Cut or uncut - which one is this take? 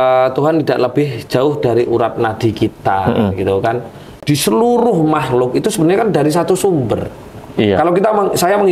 cut